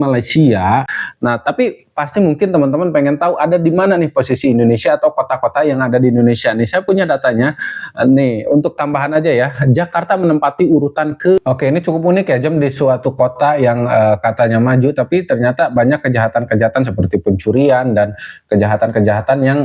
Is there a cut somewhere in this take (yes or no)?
yes